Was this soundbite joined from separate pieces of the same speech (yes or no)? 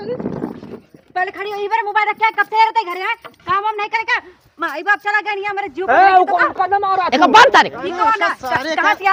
no